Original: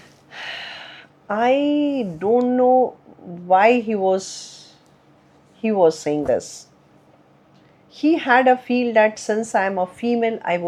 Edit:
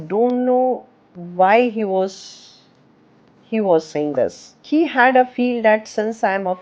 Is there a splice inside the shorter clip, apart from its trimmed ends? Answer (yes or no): yes